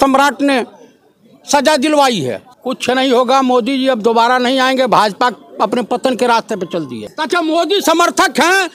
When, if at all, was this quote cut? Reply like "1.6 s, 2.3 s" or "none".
2.4 s, 7.1 s